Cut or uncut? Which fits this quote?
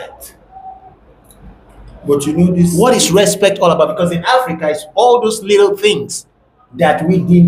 uncut